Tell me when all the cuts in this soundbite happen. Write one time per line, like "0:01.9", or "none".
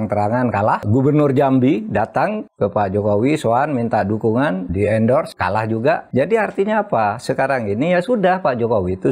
0:05.3